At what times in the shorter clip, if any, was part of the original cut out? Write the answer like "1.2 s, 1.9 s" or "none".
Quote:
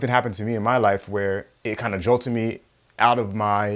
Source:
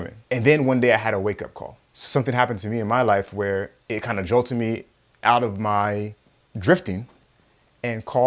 none